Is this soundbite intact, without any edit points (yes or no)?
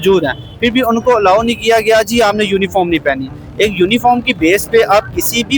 yes